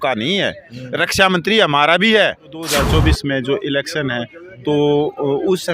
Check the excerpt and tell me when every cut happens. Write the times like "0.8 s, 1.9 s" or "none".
2.7 s